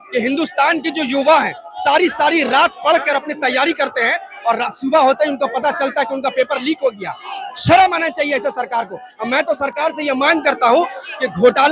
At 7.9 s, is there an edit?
no; 0 cuts

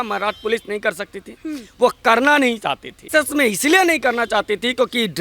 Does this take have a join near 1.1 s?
no; 1 cut; at 3.1 s

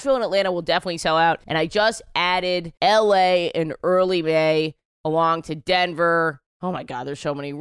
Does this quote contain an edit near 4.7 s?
no; 0 cuts

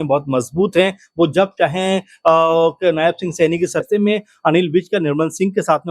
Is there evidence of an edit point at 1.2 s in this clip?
no; 1 cut; at 3.9 s

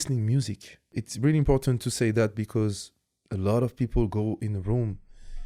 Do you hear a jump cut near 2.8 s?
no; 1 cut; at 1.0 s

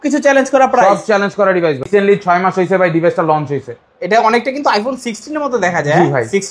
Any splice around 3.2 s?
no; 1 cut; at 1.9 s

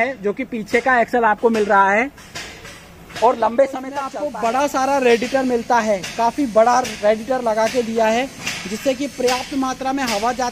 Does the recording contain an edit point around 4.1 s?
yes; 1 cut; at 4.1 s

